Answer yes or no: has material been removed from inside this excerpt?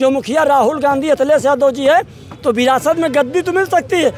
no